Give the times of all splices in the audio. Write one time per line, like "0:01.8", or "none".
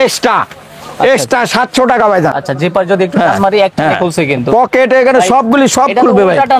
0:02.4